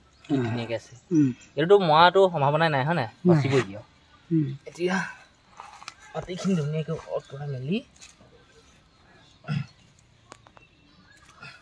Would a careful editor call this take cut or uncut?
uncut